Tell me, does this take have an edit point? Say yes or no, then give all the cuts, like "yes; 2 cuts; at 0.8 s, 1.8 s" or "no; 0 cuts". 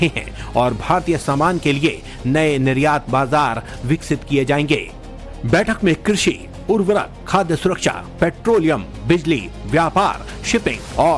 yes; 1 cut; at 8.9 s